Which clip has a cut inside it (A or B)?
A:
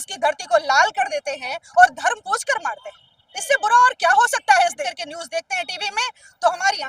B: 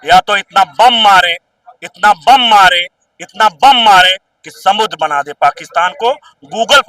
A